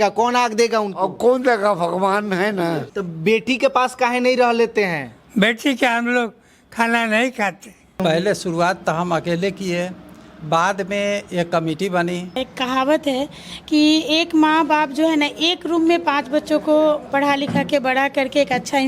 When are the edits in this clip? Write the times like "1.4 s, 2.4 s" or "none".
2.9 s, 8.0 s, 12.4 s